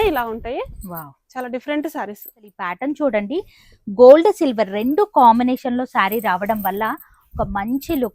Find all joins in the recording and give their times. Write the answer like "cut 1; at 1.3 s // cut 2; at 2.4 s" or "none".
cut 1; at 2.7 s